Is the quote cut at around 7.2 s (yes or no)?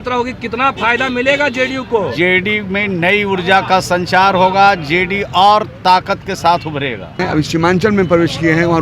yes